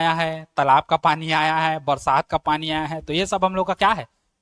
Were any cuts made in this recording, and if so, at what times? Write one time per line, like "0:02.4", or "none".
none